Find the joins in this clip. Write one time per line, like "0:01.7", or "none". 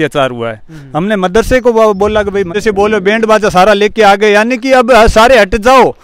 0:02.5